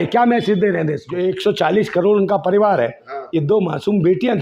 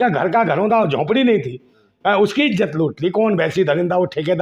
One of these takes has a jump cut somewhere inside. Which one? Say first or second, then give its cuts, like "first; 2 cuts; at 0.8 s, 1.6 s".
first; 1 cut; at 1.1 s